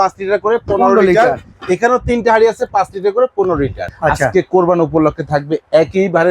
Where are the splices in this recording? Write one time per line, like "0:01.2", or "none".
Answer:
0:03.8